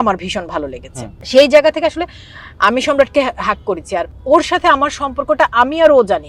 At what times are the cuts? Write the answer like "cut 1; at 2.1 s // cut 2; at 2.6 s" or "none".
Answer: cut 1; at 1.2 s // cut 2; at 4.1 s